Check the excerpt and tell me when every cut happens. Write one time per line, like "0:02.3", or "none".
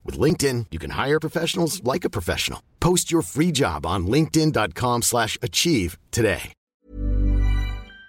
0:06.8

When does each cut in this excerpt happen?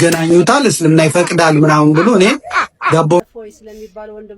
0:03.2

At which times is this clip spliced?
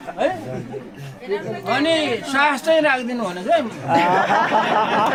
none

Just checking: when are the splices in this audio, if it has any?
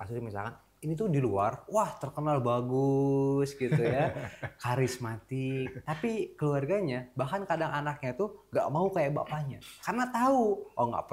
none

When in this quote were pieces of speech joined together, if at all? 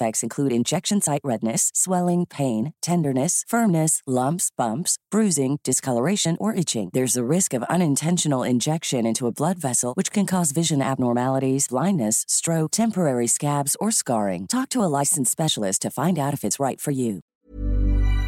0:17.3

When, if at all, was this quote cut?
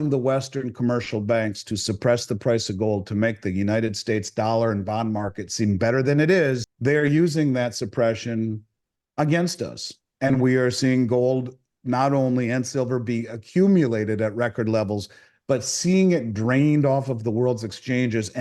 0:06.7

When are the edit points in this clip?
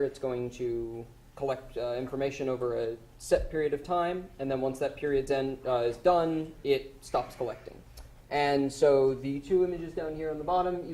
0:04.1

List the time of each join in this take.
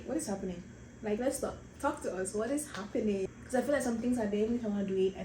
0:03.3

